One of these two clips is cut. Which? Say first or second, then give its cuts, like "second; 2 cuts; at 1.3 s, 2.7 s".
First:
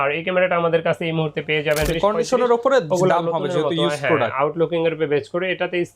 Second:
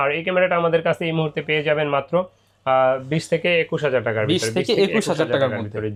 first; 1 cut; at 1.9 s